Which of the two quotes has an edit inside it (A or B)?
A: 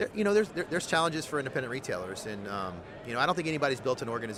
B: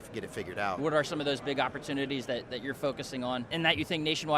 B